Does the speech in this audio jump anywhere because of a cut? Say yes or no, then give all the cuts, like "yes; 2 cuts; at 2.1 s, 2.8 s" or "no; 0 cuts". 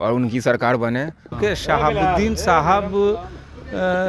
yes; 1 cut; at 1.3 s